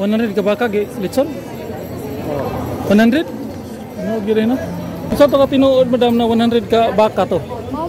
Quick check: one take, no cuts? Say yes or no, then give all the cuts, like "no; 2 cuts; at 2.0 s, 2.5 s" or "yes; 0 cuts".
no; 1 cut; at 5.0 s